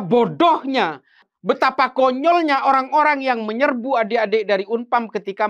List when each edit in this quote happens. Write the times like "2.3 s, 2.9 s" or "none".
1.3 s